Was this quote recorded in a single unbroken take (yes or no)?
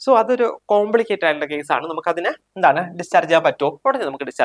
yes